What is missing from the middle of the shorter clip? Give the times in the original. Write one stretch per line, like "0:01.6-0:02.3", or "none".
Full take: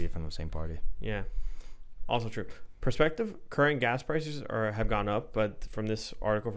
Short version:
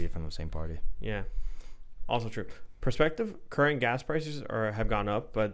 none